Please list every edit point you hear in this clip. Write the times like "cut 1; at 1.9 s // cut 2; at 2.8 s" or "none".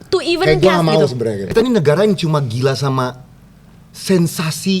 cut 1; at 1.5 s